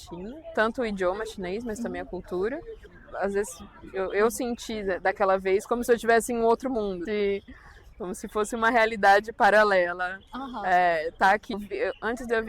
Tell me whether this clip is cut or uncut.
cut